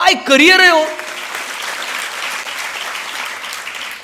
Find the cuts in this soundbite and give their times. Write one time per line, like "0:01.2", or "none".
none

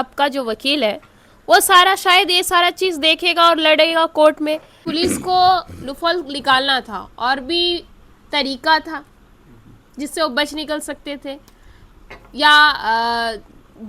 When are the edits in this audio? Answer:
0:04.8

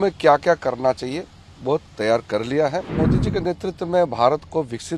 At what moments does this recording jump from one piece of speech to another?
0:02.9

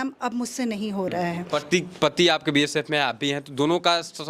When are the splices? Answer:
0:01.5

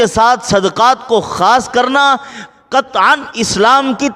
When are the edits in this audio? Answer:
none

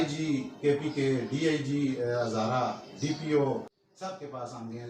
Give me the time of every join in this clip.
0:03.7

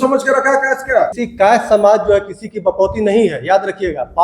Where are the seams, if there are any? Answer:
0:01.2

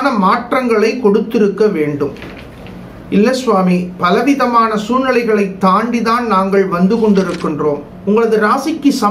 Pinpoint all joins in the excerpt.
0:07.9

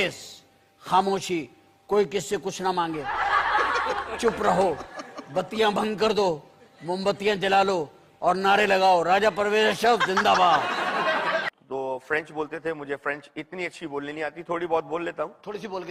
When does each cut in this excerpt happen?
0:11.6

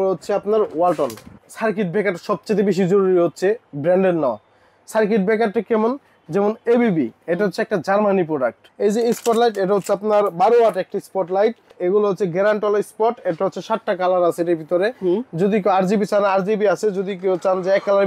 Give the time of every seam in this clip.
0:01.4
0:08.6
0:11.8

